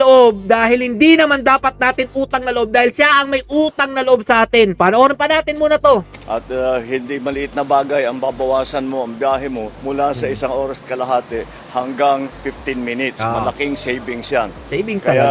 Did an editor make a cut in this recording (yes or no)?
no